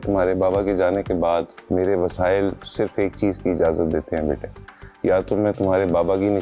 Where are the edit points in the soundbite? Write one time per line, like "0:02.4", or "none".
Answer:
0:01.6